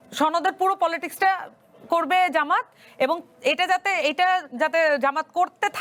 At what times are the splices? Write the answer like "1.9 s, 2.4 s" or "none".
none